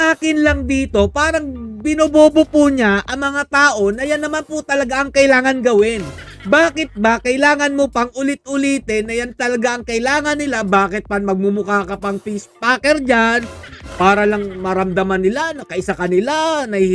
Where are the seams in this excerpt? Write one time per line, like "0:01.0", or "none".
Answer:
none